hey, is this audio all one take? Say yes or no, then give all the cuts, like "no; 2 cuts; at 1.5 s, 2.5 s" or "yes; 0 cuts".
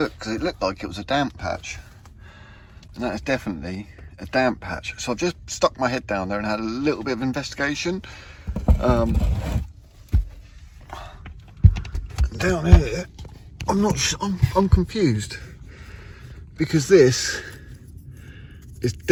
yes; 0 cuts